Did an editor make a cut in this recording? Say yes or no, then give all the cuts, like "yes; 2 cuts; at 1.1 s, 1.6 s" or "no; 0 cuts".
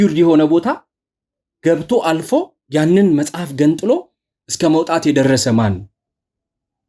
no; 0 cuts